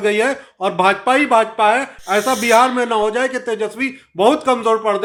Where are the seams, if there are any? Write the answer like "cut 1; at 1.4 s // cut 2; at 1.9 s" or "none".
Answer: none